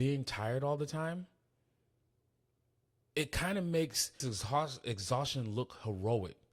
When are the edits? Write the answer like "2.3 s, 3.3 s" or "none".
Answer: 4.3 s